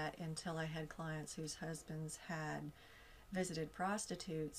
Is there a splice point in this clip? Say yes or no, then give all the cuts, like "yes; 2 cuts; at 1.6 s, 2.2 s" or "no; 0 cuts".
no; 0 cuts